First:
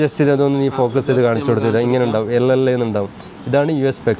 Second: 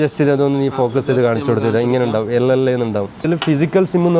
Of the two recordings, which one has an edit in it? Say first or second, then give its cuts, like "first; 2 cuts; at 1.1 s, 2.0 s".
second; 1 cut; at 3.2 s